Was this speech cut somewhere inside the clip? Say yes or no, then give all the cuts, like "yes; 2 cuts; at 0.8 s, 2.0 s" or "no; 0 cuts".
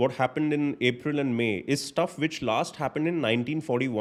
no; 0 cuts